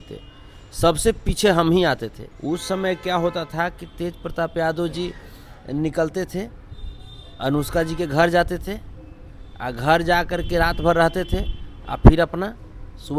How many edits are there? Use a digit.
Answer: 1